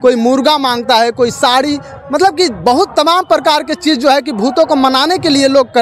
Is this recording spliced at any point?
no; 0 cuts

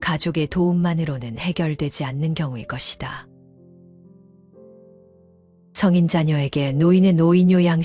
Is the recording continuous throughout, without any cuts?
no; 2 cuts; at 3.2 s, 5.8 s

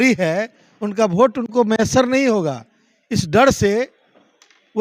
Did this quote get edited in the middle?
no; 0 cuts

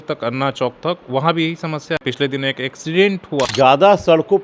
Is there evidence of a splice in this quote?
yes; 2 cuts; at 2.0 s, 3.5 s

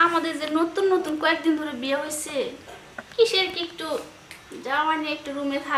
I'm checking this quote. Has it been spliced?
no; 0 cuts

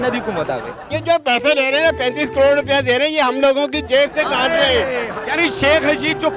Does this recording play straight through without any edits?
no; 1 cut; at 1.0 s

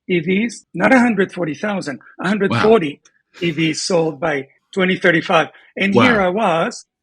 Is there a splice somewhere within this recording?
no; 0 cuts

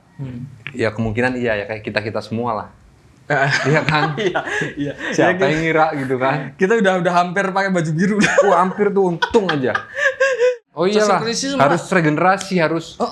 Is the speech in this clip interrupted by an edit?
yes; 1 cut; at 10.6 s

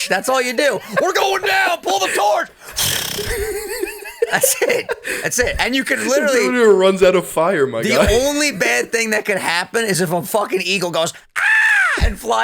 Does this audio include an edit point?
no; 0 cuts

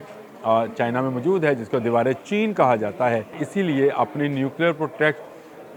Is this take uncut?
no; 1 cut; at 3.4 s

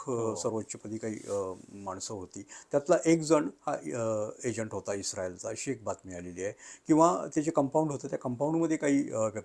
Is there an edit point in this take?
no; 0 cuts

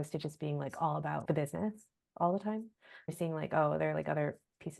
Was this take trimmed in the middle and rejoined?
yes; 2 cuts; at 1.2 s, 3.1 s

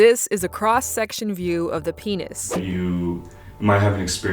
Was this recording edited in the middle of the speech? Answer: yes; 1 cut; at 2.6 s

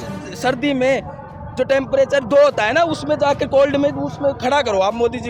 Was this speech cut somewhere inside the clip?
no; 0 cuts

